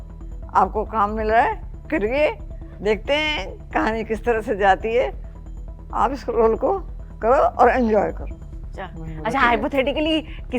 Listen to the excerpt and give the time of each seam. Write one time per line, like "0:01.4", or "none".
none